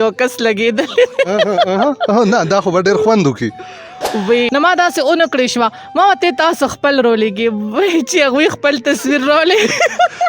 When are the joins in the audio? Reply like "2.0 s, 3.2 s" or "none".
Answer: 4.5 s

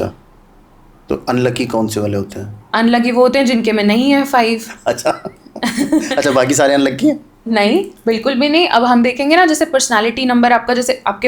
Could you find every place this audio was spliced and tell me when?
none

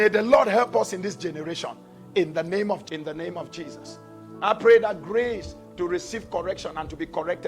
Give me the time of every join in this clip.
2.8 s

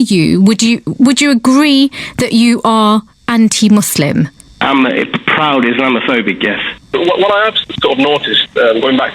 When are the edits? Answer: 6.9 s

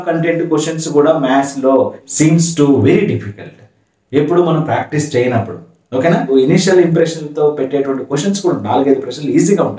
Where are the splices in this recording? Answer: 2.0 s, 6.3 s

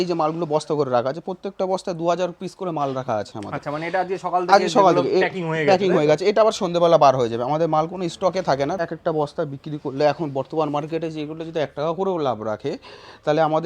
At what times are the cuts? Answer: 8.8 s

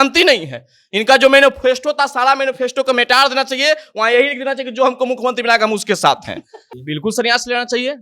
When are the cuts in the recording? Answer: 6.7 s

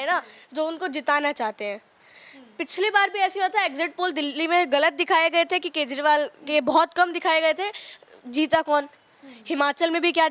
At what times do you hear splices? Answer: none

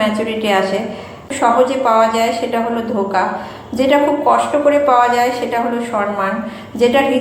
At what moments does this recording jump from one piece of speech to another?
1.2 s

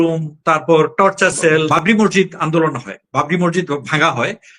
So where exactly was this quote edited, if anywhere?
1.7 s

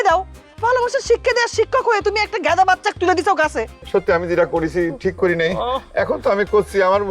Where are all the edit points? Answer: 3.7 s

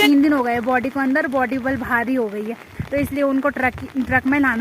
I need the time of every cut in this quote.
none

